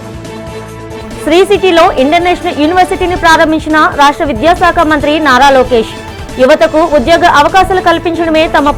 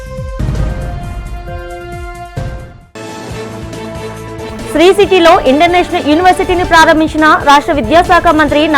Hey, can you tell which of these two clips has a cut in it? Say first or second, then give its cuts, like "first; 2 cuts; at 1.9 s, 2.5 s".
second; 1 cut; at 2.3 s